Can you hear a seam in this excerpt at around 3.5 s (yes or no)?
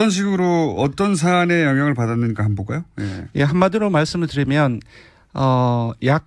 yes